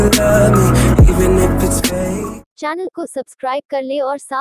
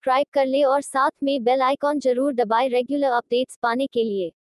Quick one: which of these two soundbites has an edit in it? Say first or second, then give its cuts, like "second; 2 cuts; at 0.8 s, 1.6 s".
first; 1 cut; at 2.5 s